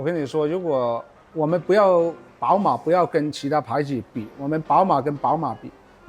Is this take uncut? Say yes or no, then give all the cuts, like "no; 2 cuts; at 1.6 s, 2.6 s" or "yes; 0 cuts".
no; 1 cut; at 2.3 s